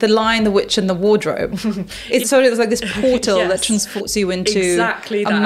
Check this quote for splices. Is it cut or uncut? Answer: cut